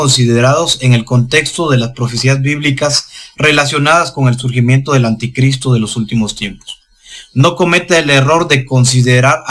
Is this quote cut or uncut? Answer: cut